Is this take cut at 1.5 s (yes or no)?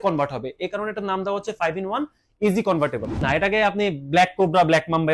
no